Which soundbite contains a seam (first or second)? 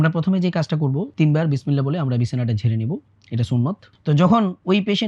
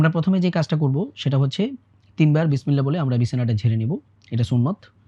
first